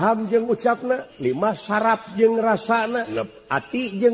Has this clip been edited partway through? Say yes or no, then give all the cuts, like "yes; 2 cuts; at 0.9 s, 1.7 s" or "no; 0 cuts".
yes; 2 cuts; at 1.1 s, 3.1 s